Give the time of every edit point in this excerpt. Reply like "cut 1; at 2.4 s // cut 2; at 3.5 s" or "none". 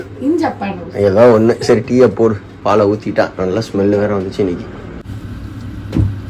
cut 1; at 5.0 s

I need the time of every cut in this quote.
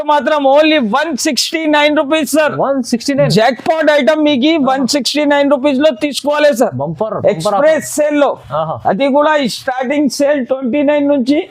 none

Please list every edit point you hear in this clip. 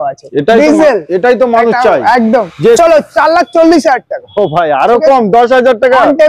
cut 1; at 2.8 s

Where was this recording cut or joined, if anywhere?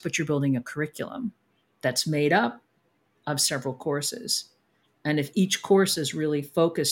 none

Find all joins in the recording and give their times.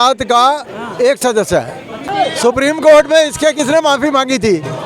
cut 1; at 2.1 s

